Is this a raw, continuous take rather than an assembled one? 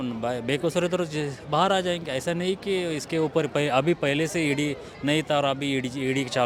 yes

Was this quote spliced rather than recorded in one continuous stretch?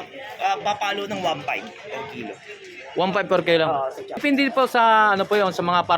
yes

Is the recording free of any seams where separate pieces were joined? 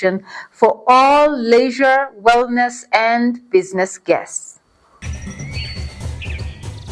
no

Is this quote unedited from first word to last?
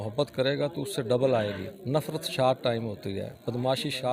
no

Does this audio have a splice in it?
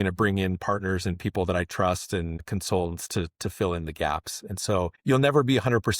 yes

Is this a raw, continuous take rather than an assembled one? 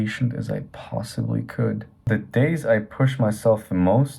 no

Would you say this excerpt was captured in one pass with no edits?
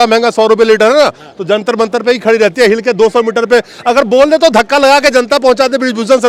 yes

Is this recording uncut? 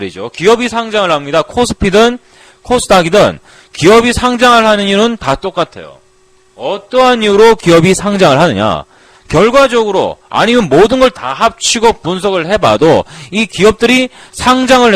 no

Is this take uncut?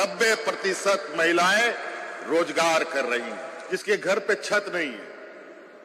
no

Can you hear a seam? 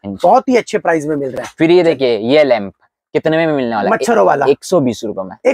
no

